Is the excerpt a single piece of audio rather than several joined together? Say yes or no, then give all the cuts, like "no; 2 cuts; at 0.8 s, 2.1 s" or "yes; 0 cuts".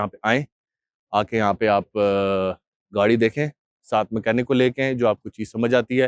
yes; 0 cuts